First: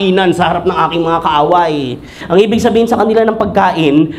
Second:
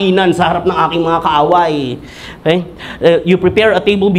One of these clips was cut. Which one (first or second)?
first